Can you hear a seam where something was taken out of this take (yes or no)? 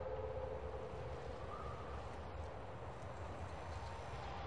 yes